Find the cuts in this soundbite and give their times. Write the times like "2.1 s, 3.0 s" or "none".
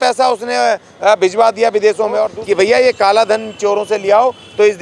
2.3 s